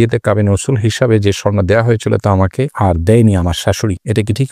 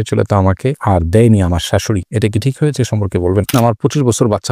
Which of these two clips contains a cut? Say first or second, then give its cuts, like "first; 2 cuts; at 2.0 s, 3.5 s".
second; 1 cut; at 3.5 s